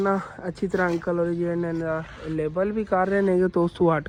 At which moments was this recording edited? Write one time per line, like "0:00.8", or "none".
none